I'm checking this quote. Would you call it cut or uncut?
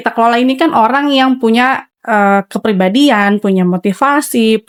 uncut